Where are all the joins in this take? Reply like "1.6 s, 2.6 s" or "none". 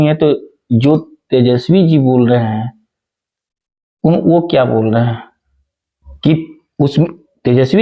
none

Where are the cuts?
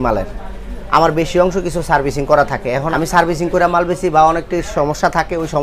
2.9 s

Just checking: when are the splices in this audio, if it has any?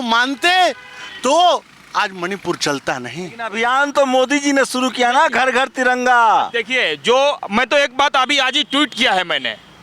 3.4 s

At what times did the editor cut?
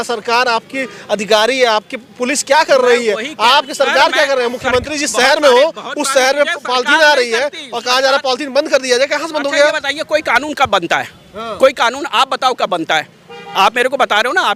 none

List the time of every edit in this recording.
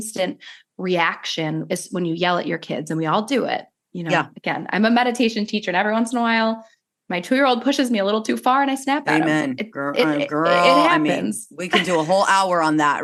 none

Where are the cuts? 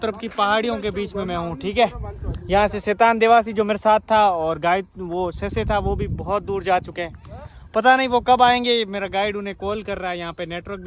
none

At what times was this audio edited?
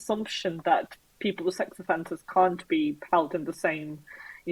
none

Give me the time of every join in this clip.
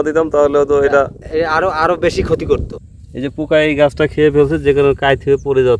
2.7 s

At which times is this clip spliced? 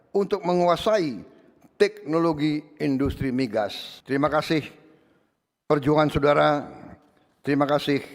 3.9 s

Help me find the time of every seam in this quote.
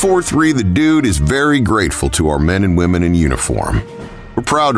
none

